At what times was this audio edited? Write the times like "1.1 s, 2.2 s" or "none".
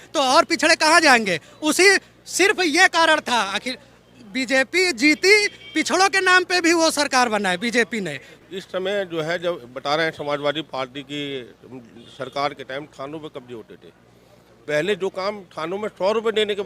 8.3 s

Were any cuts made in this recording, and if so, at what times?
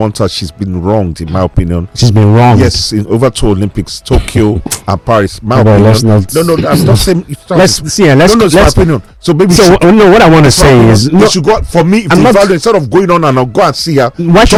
none

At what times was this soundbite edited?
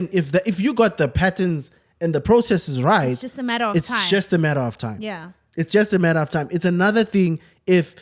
none

